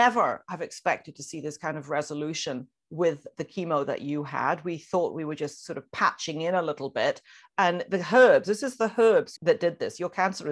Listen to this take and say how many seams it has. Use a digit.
1